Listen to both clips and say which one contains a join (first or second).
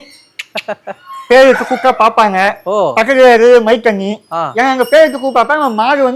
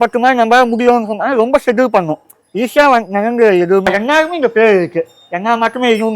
second